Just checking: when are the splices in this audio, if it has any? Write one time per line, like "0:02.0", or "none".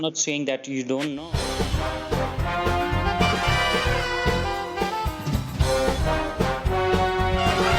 0:01.2